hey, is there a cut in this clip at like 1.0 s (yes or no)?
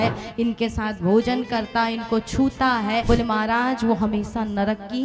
no